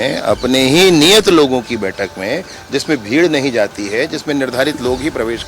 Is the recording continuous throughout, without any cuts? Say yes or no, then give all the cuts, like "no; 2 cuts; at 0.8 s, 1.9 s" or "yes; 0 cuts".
yes; 0 cuts